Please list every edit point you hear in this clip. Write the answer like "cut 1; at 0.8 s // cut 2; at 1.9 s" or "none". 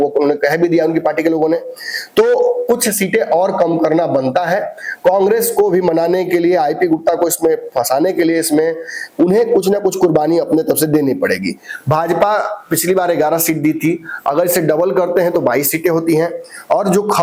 none